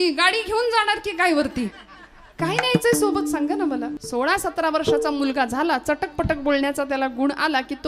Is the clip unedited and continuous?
no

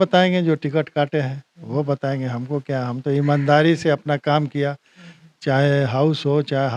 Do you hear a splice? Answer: no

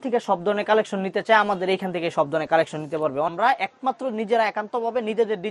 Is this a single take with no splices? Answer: no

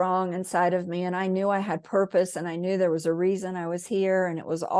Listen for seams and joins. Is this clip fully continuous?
yes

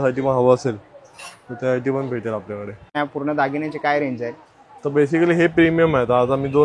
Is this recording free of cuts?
no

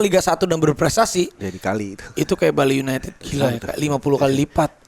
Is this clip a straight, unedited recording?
no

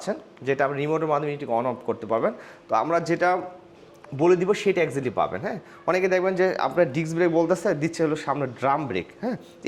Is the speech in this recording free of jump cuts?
yes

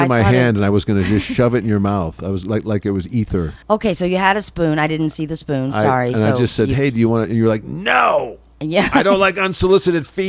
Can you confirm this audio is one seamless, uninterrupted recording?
no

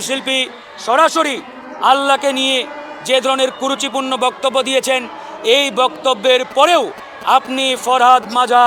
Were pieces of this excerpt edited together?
no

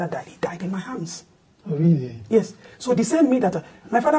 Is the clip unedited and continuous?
yes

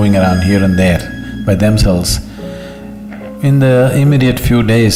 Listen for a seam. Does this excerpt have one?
no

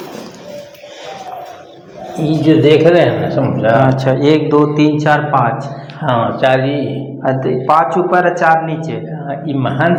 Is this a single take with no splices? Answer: yes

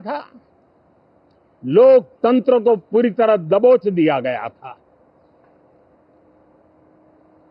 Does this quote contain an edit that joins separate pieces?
no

